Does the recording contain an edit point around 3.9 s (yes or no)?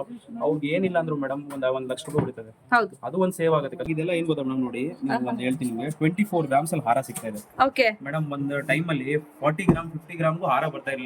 yes